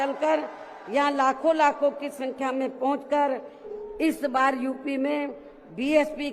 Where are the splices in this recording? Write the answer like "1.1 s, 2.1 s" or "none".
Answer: 3.7 s